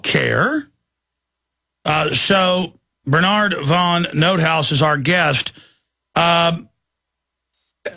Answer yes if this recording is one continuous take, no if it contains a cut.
no